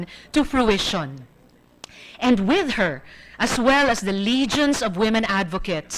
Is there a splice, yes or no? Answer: yes